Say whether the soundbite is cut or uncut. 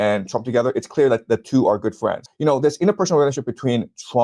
cut